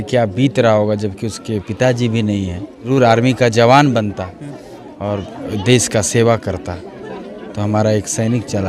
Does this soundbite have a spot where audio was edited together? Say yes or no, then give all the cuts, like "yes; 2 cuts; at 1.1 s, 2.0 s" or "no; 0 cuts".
yes; 1 cut; at 2.9 s